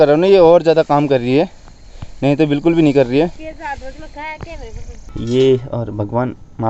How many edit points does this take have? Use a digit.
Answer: 1